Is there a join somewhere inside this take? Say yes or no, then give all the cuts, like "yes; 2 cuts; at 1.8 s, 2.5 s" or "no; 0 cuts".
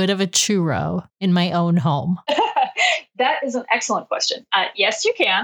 yes; 1 cut; at 2.2 s